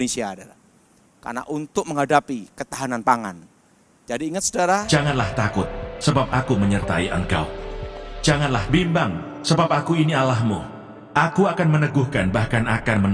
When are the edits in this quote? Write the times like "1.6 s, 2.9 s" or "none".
4.8 s